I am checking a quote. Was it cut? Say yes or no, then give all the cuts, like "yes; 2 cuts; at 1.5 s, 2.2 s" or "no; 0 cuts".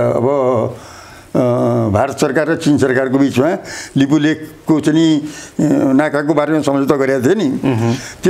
no; 0 cuts